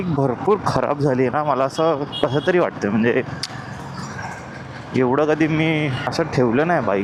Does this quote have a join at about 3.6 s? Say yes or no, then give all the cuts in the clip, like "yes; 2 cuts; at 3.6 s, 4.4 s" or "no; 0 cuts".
no; 0 cuts